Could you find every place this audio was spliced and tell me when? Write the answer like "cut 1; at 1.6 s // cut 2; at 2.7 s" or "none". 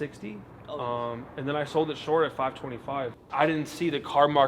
cut 1; at 3.2 s